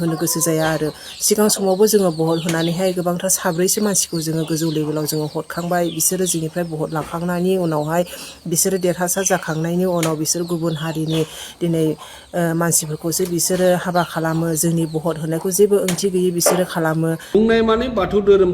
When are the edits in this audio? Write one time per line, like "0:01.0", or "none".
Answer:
0:17.2

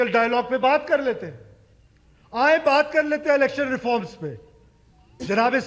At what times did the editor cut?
none

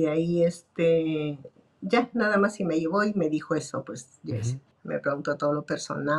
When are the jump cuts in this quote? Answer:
0:04.7

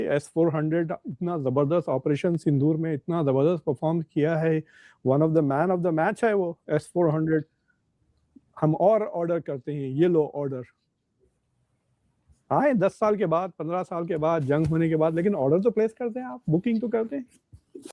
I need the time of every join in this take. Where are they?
none

